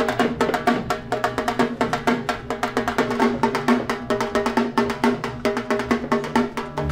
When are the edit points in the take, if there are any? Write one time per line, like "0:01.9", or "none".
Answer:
none